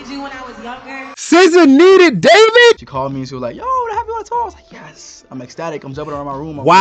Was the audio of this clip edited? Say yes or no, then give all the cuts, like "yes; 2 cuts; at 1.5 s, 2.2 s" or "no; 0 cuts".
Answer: yes; 1 cut; at 2.8 s